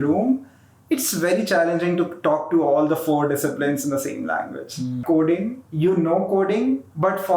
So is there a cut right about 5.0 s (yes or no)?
yes